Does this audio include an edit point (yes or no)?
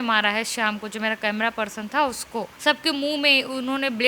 yes